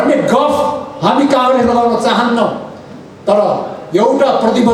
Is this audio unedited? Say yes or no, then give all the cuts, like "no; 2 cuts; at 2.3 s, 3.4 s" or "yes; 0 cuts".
yes; 0 cuts